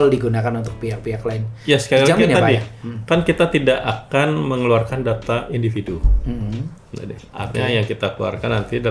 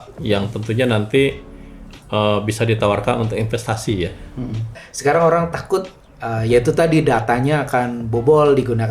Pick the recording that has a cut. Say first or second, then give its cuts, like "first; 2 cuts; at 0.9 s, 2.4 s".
second; 1 cut; at 4.8 s